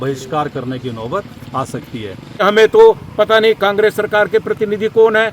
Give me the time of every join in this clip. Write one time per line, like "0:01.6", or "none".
0:02.4